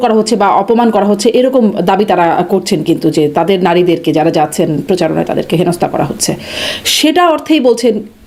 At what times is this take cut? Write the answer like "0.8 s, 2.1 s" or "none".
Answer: none